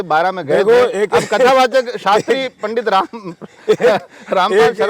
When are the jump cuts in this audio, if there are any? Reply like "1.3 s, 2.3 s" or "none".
none